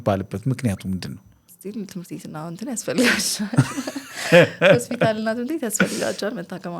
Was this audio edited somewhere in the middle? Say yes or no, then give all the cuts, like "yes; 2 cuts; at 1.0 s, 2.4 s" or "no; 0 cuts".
yes; 1 cut; at 1.4 s